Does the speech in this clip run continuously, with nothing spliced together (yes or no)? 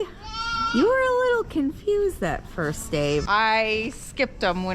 no